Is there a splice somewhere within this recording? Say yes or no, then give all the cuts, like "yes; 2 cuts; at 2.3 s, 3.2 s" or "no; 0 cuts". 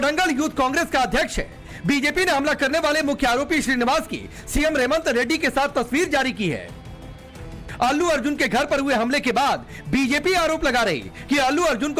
yes; 1 cut; at 1.9 s